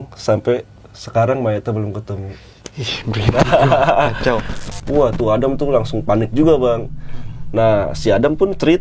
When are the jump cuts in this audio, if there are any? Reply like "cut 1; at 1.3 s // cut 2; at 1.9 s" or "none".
cut 1; at 4.5 s